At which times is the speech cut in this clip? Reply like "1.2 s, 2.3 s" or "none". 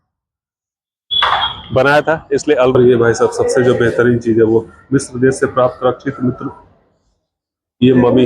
2.8 s